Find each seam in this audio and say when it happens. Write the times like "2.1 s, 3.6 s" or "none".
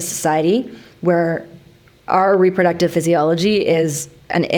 none